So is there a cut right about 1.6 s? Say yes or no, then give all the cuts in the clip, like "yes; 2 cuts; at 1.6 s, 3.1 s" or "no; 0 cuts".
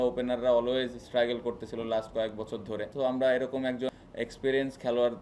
no; 2 cuts; at 2.9 s, 3.9 s